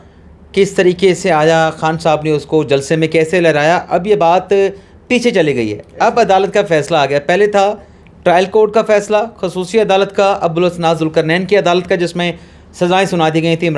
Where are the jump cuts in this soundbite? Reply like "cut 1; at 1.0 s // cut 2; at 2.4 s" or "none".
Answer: none